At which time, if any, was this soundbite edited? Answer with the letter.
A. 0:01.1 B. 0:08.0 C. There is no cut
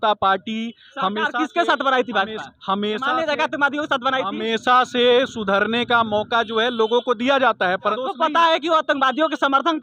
B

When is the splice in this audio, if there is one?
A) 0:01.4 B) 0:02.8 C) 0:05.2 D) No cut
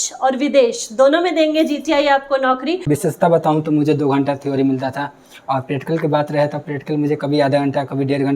B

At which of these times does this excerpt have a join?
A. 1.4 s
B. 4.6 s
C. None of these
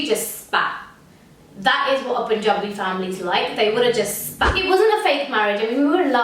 B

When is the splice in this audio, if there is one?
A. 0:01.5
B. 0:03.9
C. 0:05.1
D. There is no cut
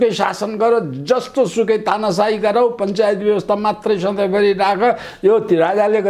D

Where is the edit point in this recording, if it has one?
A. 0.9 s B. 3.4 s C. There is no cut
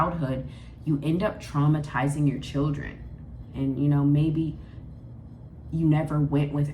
B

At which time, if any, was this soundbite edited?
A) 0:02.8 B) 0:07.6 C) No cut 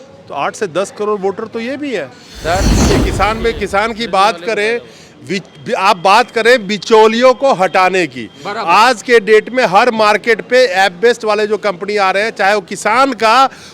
A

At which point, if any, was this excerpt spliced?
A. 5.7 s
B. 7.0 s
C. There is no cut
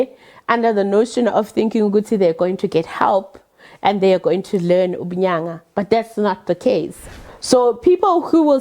B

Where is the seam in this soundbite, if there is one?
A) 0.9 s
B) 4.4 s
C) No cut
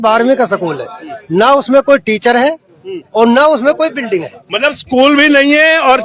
B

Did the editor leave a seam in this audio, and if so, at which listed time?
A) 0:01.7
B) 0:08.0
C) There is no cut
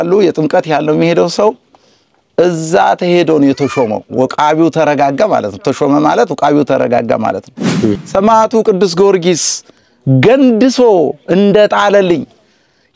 B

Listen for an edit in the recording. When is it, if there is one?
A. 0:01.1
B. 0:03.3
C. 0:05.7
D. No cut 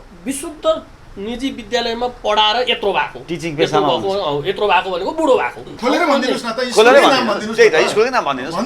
C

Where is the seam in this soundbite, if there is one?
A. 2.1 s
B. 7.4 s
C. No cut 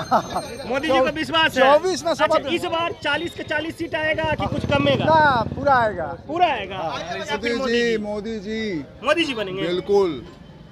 B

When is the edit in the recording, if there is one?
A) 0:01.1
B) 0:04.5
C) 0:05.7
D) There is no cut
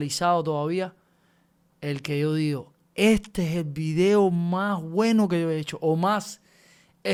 D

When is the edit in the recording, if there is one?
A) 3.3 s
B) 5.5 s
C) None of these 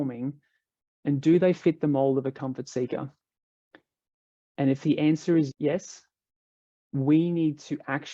B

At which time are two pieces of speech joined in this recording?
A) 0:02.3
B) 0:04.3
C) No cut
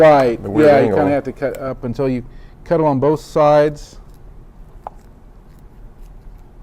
B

